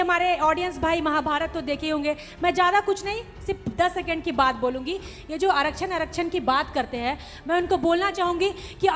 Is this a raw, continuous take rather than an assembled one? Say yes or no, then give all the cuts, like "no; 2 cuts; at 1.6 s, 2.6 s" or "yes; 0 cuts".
yes; 0 cuts